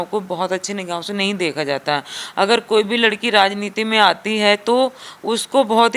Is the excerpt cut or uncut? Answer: uncut